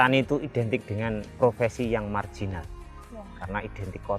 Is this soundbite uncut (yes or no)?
no